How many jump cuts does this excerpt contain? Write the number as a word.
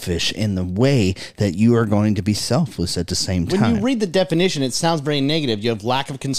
zero